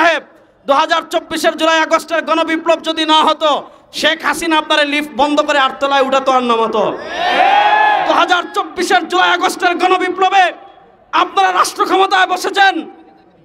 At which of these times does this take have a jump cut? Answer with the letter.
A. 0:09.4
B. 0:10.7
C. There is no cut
C